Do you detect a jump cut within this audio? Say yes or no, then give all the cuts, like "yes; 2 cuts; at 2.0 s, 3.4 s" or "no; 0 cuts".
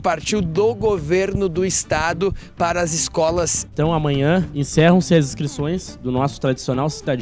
yes; 1 cut; at 3.7 s